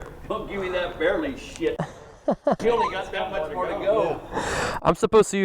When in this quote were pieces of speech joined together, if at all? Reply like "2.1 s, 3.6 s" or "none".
none